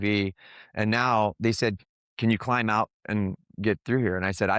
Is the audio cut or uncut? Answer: cut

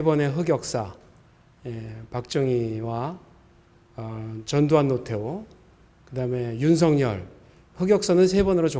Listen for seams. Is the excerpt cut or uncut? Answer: uncut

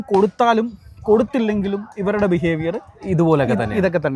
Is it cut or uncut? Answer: uncut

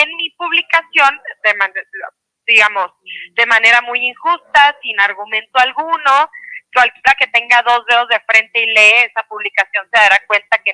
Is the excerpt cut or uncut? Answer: uncut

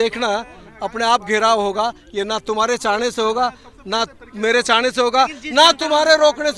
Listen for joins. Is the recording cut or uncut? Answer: uncut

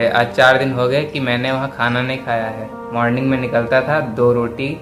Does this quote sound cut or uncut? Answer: uncut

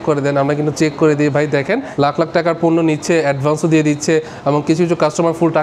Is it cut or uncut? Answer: cut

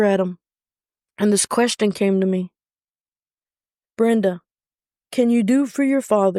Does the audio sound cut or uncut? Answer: uncut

